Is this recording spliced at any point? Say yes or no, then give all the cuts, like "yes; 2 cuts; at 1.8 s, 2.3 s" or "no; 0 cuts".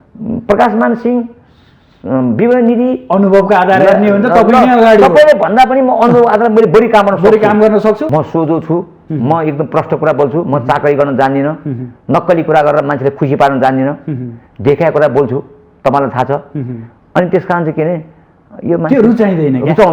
yes; 1 cut; at 8.0 s